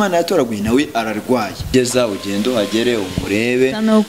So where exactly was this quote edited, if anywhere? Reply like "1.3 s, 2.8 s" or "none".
1.7 s